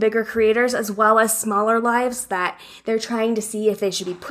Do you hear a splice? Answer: no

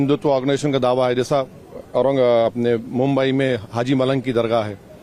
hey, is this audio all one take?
yes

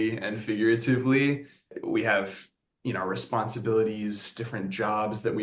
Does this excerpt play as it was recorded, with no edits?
no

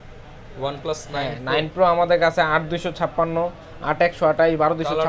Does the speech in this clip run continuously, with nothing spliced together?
yes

